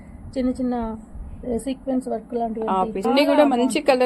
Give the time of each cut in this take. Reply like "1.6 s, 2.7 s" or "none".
3.1 s